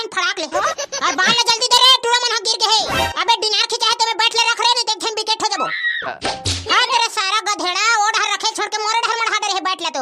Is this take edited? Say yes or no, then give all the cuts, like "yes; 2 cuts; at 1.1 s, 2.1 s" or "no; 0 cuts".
yes; 2 cuts; at 3.1 s, 6.6 s